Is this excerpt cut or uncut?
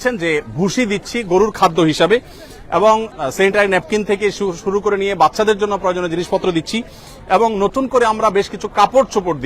uncut